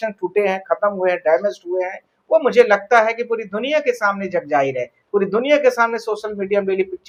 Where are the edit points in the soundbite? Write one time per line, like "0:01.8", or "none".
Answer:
none

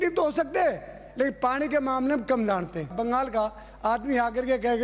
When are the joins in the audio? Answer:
none

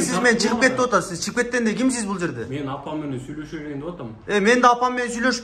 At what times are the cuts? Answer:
none

